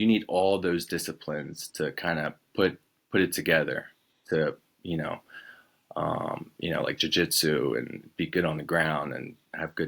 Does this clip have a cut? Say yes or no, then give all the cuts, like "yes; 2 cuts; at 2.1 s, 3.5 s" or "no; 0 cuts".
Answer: no; 0 cuts